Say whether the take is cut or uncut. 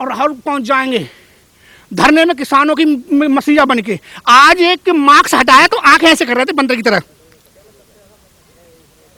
uncut